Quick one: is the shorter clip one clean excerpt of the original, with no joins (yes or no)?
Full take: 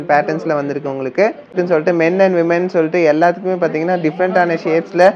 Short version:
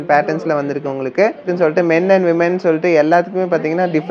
no